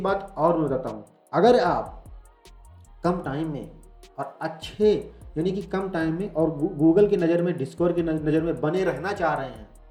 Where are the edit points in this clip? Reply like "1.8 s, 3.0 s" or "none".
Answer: none